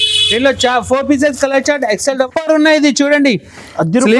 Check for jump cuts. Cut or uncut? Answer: cut